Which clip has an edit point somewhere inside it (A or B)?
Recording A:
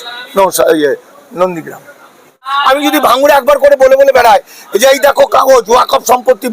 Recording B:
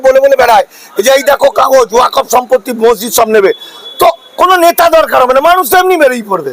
A